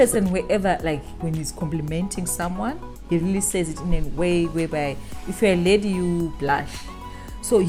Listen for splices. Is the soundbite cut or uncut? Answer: uncut